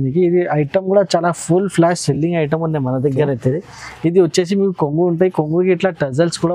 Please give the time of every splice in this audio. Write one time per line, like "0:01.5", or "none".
none